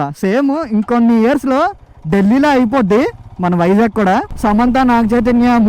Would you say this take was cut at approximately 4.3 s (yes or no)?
yes